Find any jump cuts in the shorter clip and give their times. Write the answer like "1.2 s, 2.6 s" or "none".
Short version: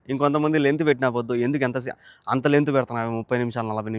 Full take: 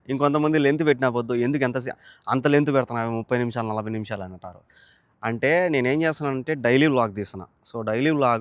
none